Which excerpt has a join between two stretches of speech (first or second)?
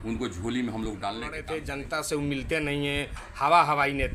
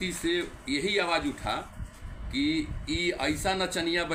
first